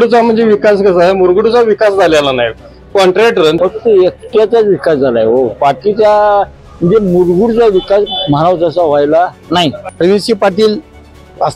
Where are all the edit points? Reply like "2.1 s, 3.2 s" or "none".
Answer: 3.6 s, 9.8 s